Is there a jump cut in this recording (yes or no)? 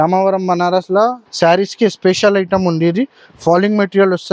yes